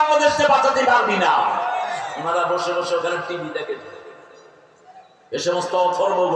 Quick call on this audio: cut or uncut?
cut